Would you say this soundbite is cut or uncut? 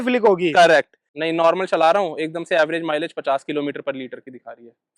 cut